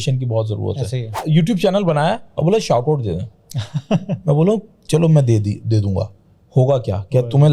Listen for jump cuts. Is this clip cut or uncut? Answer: cut